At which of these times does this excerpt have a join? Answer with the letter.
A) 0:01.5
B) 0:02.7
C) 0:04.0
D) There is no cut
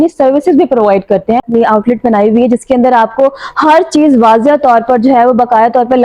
A